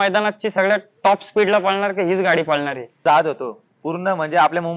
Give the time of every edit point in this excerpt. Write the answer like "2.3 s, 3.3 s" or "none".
3.0 s